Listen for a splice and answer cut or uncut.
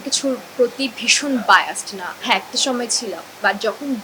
uncut